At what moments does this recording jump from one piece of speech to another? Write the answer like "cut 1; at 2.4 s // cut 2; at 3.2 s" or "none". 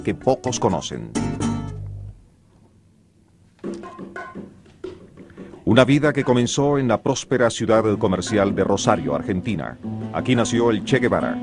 none